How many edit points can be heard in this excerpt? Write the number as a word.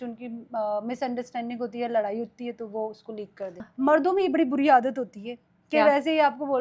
one